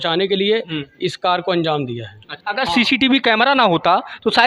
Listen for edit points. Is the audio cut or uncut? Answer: cut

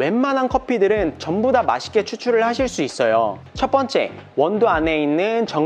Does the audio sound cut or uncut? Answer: cut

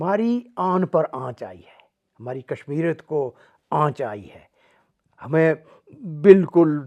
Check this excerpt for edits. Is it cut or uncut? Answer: uncut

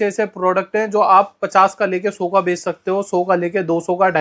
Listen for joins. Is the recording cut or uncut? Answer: uncut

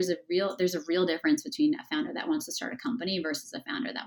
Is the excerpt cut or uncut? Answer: uncut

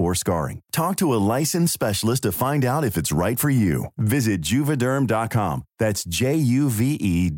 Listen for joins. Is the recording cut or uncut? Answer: uncut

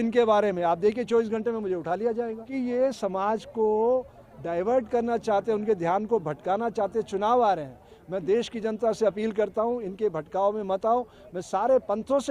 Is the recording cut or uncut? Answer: cut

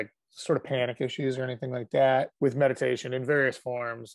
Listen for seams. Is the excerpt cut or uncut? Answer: uncut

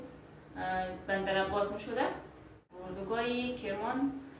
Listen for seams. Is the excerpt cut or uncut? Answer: cut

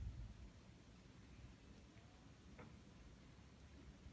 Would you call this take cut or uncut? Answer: uncut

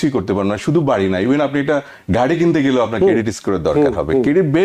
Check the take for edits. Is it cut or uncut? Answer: uncut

